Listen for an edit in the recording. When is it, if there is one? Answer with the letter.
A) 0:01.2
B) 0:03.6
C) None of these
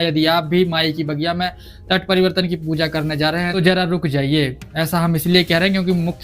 B